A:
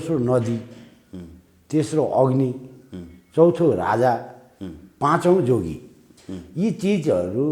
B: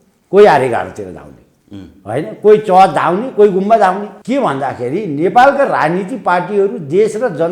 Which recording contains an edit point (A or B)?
B